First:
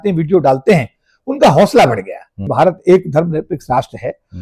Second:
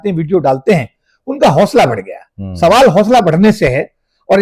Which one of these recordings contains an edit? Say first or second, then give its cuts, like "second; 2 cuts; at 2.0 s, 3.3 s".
first; 1 cut; at 2.5 s